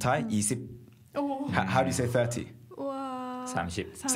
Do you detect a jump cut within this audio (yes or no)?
no